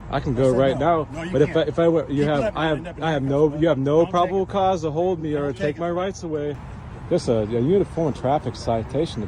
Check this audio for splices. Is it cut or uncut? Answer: cut